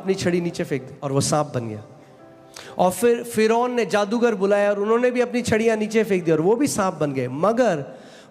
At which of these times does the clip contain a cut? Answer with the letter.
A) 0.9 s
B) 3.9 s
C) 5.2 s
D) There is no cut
A